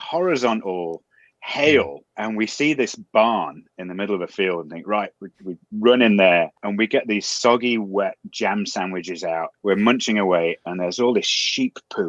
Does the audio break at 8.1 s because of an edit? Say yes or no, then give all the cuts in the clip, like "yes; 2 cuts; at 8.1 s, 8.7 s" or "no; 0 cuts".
no; 3 cuts; at 2.1 s, 6.6 s, 9.5 s